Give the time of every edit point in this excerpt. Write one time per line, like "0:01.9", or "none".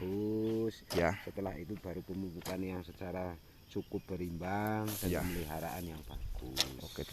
none